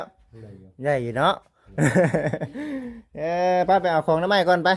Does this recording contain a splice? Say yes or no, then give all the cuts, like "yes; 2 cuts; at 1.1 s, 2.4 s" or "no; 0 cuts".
no; 0 cuts